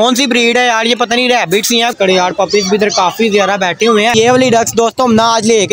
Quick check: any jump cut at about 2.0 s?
yes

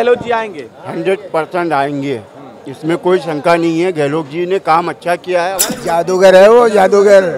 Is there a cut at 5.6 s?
yes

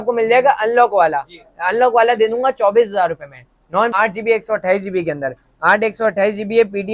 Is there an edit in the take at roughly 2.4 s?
no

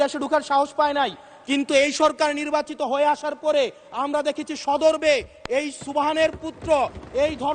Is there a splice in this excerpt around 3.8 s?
no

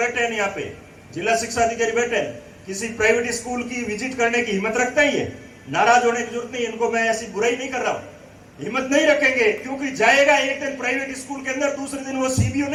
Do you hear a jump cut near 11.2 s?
no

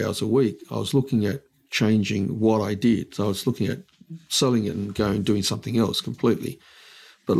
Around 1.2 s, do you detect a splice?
no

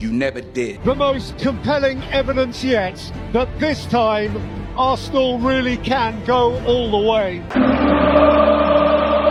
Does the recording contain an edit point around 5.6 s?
no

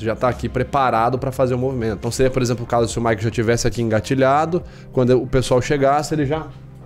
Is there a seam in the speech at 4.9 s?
no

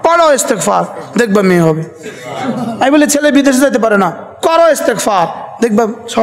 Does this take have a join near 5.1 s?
no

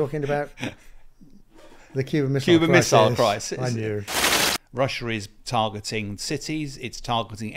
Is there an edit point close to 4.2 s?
yes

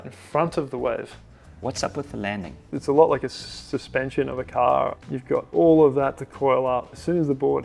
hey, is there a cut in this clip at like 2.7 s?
yes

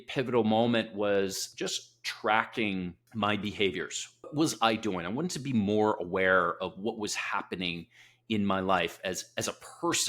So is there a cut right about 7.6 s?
no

